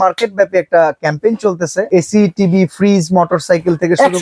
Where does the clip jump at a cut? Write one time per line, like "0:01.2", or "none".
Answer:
0:01.9